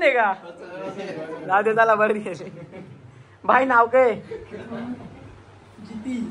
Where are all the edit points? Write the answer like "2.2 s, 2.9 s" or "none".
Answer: none